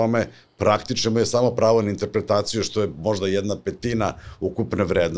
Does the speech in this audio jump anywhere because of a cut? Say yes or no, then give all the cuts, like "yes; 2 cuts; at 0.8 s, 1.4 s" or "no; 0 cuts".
no; 0 cuts